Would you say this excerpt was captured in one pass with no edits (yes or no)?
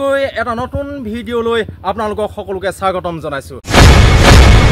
no